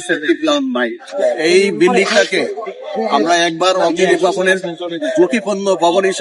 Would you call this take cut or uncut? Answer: cut